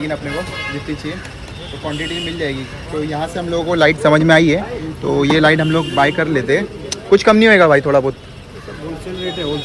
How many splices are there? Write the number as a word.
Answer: zero